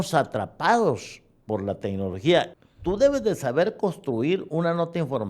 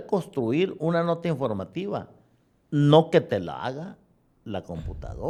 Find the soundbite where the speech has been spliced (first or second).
first